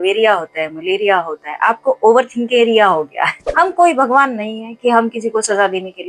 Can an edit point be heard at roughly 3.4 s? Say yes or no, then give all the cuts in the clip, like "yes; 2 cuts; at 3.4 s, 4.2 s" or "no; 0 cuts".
yes; 1 cut; at 3.4 s